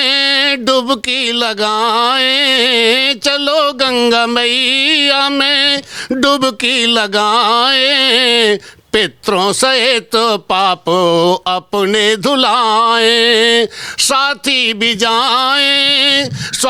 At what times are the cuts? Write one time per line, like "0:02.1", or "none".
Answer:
none